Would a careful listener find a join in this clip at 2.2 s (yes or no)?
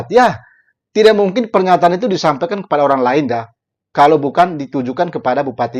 no